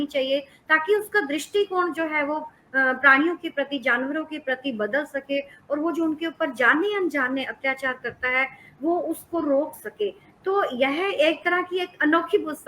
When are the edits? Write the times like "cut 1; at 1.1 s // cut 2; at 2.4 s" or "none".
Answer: none